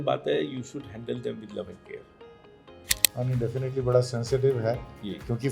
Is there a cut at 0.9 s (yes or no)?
no